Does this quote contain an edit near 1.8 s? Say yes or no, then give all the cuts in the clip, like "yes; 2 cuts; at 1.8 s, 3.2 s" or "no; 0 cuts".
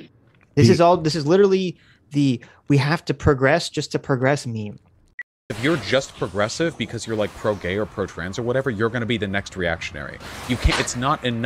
no; 1 cut; at 5.5 s